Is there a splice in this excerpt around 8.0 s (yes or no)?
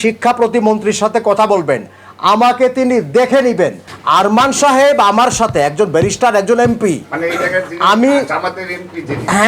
no